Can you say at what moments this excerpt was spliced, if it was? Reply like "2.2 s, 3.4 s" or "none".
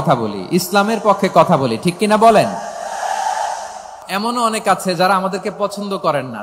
4.0 s